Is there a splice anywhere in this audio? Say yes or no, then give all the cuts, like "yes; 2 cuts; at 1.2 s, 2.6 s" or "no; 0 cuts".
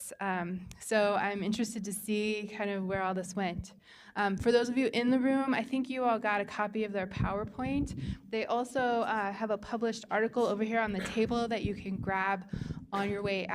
yes; 1 cut; at 9.5 s